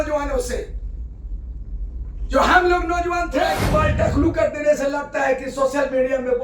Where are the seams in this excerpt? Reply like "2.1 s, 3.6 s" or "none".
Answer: 3.6 s